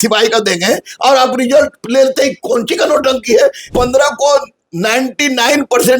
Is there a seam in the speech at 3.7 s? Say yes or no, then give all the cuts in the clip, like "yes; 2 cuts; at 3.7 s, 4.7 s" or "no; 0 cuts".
yes; 1 cut; at 3.7 s